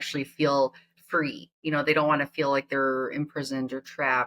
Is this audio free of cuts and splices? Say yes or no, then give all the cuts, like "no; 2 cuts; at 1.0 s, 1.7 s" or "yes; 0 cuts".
yes; 0 cuts